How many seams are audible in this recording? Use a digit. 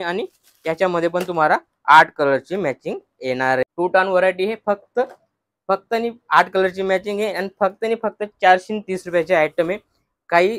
1